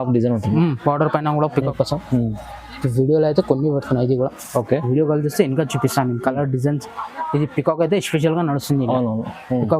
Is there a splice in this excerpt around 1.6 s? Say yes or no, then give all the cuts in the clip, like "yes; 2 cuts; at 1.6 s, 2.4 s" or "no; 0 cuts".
yes; 1 cut; at 1.6 s